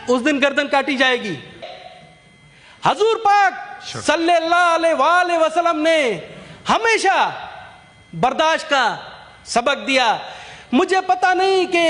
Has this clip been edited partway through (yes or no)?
yes